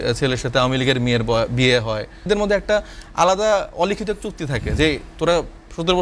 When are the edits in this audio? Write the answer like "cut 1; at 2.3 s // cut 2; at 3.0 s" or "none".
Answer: cut 1; at 2.3 s